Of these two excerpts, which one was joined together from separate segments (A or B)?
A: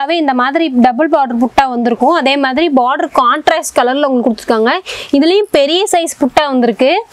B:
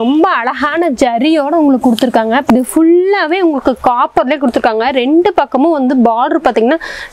B